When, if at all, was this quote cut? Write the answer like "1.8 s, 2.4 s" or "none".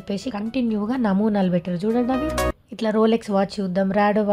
2.5 s